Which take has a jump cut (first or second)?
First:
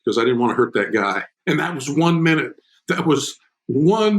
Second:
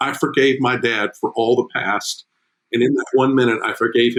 first